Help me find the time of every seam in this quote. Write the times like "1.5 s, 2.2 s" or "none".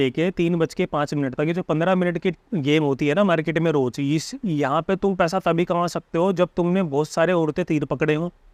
none